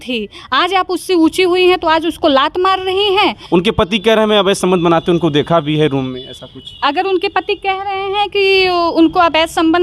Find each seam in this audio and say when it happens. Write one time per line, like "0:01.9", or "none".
0:03.4